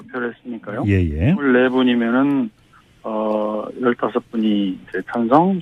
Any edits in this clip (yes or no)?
no